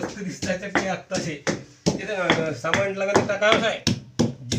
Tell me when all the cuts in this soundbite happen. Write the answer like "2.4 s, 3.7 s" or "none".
none